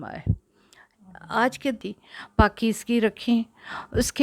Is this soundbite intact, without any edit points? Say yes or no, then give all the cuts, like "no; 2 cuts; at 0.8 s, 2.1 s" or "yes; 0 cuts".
no; 1 cut; at 1.8 s